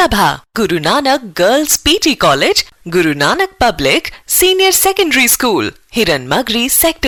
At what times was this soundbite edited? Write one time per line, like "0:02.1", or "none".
none